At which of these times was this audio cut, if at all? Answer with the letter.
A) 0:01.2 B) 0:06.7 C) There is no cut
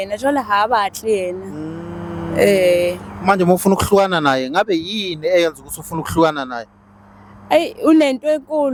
C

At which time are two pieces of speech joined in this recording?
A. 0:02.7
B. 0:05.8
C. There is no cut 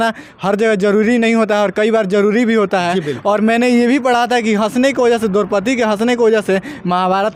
C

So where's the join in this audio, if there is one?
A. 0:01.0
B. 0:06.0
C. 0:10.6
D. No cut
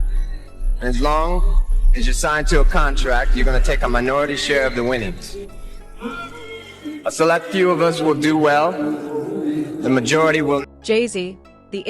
C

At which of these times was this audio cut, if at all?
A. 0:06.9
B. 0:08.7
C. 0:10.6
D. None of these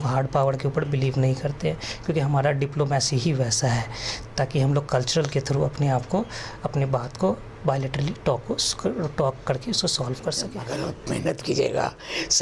C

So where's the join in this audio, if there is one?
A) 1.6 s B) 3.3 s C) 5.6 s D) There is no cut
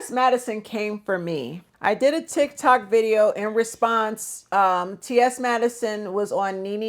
A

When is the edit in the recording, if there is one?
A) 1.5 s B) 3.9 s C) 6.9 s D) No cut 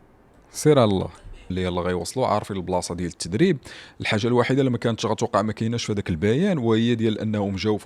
A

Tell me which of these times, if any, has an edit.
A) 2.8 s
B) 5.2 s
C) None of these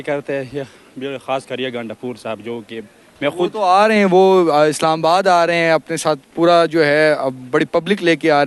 C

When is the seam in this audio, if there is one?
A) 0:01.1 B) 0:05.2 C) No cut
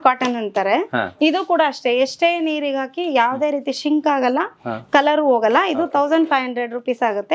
A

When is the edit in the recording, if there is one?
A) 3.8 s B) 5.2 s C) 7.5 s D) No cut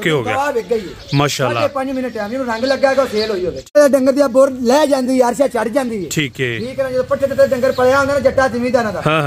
A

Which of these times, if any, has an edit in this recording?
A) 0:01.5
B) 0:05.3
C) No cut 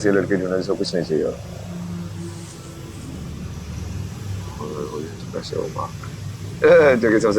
C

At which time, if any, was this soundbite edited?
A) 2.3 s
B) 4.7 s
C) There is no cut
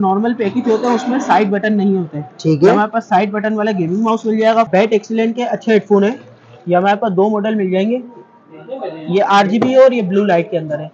B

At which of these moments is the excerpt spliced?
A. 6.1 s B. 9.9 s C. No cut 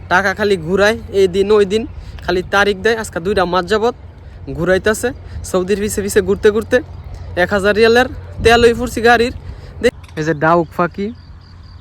B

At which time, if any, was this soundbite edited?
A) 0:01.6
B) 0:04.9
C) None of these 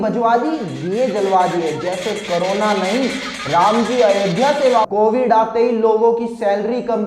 B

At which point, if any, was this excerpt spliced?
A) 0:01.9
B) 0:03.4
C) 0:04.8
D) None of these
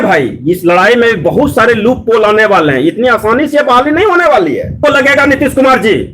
C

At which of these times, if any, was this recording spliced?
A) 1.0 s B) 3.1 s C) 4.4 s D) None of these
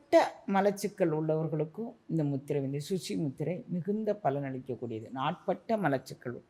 D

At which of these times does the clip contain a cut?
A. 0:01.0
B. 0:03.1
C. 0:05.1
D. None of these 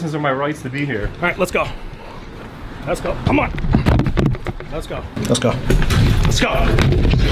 C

